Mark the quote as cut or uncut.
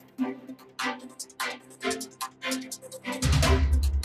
cut